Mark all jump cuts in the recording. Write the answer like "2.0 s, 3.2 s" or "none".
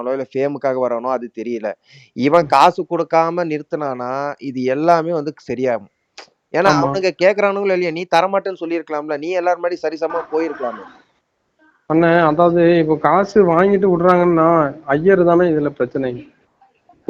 none